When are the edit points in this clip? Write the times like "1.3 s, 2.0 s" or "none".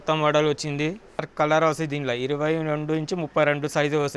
1.2 s